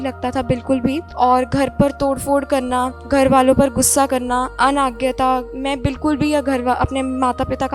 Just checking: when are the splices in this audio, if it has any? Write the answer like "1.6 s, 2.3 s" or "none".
1.1 s, 3.0 s, 4.5 s, 5.5 s